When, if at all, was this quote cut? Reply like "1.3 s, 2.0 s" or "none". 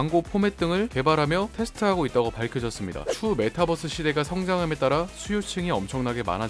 3.1 s

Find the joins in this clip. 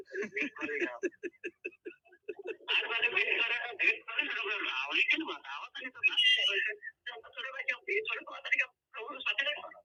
none

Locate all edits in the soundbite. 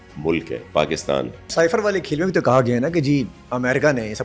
1.4 s

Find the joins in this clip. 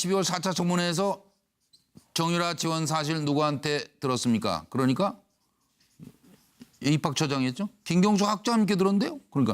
1.6 s

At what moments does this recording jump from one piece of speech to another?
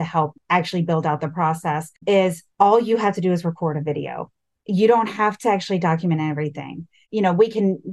7.0 s

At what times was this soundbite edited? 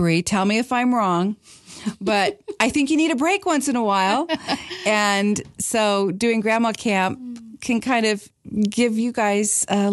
none

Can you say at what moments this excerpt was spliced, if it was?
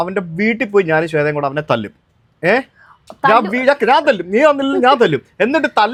none

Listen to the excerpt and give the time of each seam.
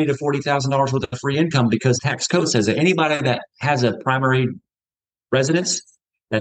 2.1 s

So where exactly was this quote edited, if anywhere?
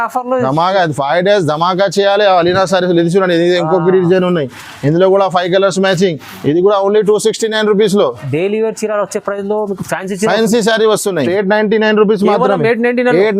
11.3 s

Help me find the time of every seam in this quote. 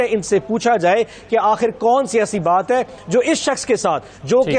none

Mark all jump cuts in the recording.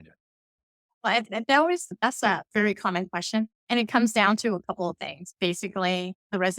3.6 s

